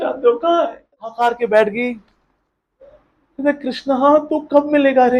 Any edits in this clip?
yes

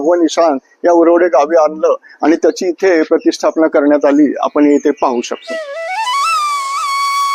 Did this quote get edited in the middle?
no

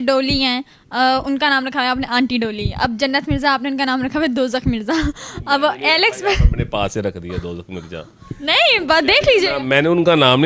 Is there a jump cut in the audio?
no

